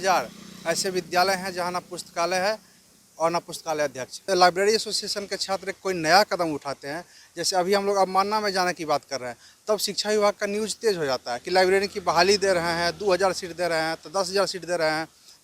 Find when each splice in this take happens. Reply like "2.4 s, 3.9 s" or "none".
4.3 s